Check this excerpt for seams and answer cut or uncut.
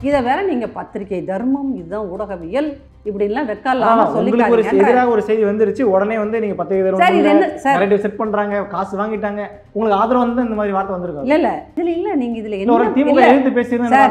uncut